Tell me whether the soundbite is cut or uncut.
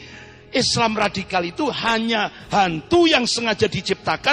uncut